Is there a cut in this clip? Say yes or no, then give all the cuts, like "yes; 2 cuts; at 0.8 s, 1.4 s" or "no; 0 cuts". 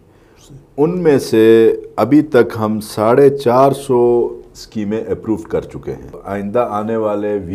yes; 1 cut; at 6.2 s